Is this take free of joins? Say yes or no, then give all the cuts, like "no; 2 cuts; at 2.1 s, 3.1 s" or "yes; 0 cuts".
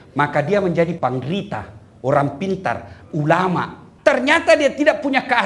no; 2 cuts; at 0.9 s, 3.9 s